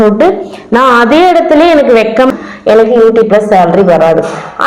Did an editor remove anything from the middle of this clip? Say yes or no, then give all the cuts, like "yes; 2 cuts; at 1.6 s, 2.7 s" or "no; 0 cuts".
yes; 1 cut; at 2.3 s